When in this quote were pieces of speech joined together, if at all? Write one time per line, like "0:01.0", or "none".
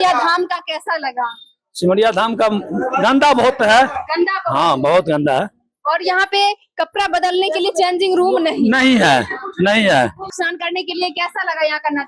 none